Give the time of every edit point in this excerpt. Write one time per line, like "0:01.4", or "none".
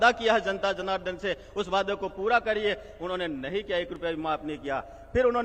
none